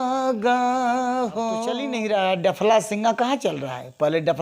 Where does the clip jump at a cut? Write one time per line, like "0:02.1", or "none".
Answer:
0:01.9